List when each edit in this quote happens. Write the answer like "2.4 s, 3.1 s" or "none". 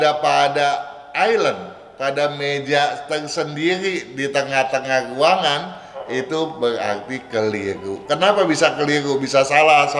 none